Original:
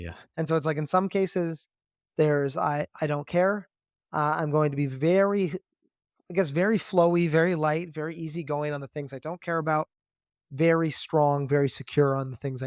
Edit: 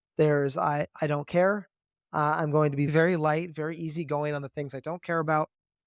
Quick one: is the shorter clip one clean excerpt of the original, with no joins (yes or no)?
no